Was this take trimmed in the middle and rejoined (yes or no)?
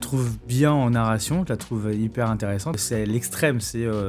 yes